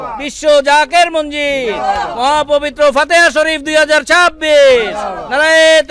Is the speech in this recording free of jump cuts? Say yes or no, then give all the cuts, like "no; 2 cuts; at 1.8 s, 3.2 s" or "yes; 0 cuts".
yes; 0 cuts